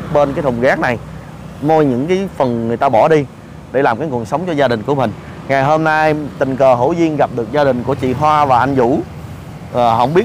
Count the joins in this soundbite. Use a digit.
0